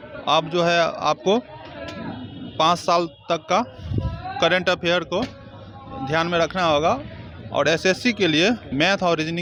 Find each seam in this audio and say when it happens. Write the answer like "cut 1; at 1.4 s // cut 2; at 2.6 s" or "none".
none